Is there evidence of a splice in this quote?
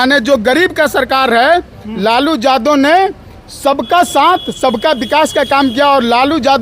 no; 0 cuts

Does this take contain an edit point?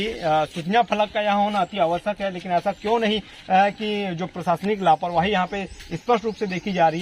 no; 0 cuts

